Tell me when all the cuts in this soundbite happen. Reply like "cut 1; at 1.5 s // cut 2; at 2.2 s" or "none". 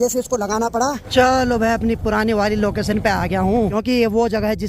cut 1; at 1.0 s // cut 2; at 3.7 s